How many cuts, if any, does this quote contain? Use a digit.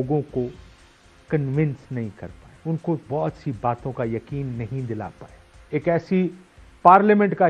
1